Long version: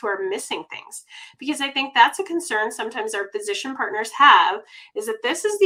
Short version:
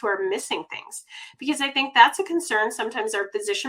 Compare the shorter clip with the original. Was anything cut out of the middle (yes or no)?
no